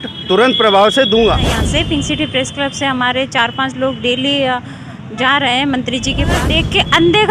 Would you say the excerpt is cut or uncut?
cut